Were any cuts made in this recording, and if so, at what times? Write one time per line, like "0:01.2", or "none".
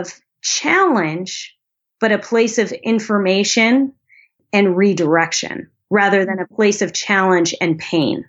0:04.4